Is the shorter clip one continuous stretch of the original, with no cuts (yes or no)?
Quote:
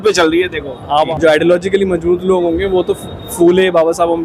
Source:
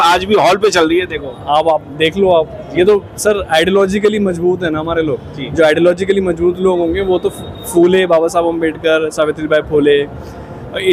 no